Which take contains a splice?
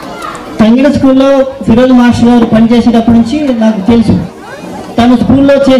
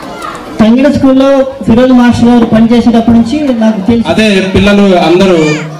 second; 1 cut; at 4.0 s

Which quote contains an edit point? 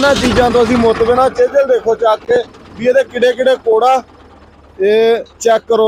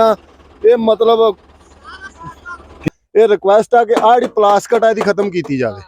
second; 1 cut; at 2.8 s

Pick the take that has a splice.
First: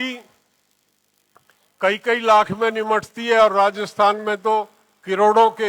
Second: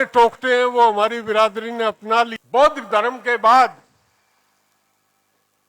second; 1 cut; at 2.3 s

